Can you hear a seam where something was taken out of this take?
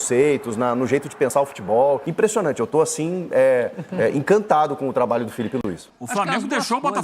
yes; 2 cuts; at 2.1 s, 5.9 s

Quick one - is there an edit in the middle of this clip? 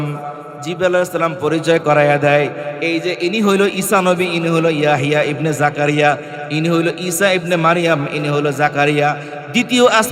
no; 0 cuts

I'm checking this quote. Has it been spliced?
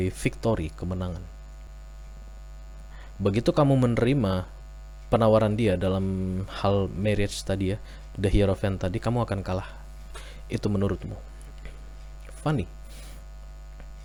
no; 0 cuts

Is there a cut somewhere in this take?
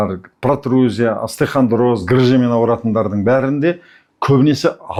no; 0 cuts

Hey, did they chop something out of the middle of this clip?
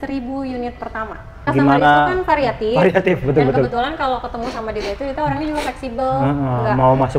yes; 1 cut; at 1.4 s

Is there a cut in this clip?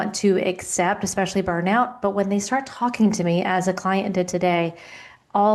no; 0 cuts

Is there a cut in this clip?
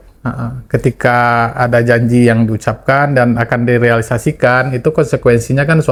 no; 0 cuts

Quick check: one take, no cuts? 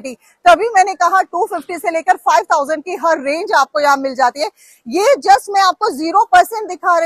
yes; 0 cuts

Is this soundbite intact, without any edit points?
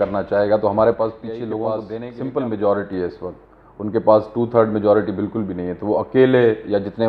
no; 1 cut; at 1.9 s

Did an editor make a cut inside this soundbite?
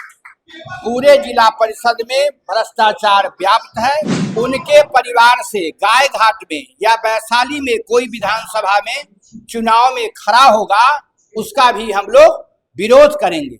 yes; 1 cut; at 4.2 s

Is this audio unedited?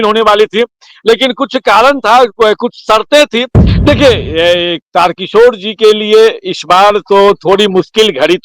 no; 1 cut; at 3.6 s

